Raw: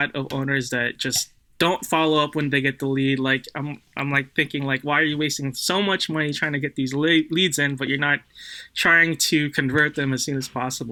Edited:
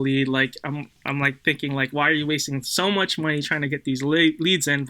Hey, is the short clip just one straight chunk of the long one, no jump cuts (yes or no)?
yes